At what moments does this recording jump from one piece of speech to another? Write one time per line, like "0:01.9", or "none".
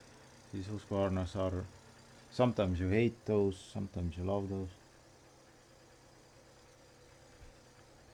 none